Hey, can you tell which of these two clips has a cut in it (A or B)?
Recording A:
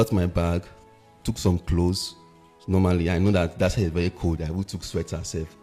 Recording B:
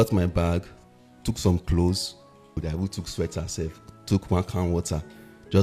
B